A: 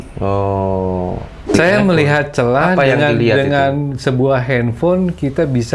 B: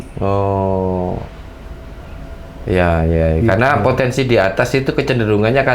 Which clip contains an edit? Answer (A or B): A